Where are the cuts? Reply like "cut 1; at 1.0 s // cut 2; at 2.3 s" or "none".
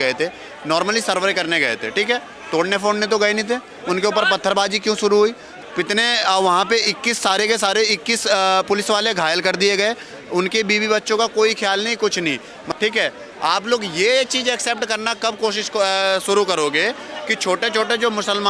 cut 1; at 5.5 s // cut 2; at 12.6 s